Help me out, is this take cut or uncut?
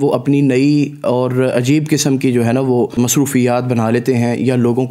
cut